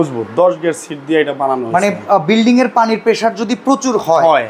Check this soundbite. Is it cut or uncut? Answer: uncut